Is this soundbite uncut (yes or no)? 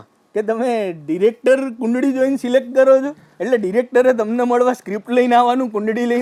yes